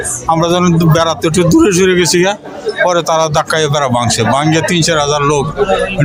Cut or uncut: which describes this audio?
uncut